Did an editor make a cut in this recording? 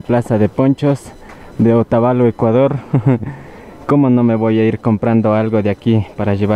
no; 0 cuts

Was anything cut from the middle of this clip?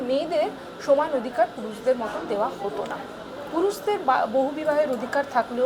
no; 0 cuts

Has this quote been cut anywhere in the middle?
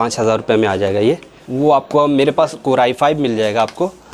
yes; 1 cut; at 1.4 s

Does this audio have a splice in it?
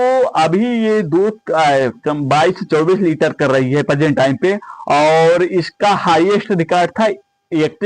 no; 0 cuts

